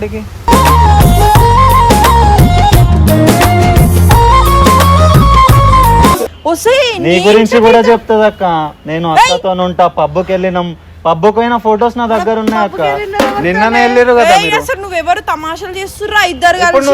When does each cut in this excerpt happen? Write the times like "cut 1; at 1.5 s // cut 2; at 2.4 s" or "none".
cut 1; at 6.3 s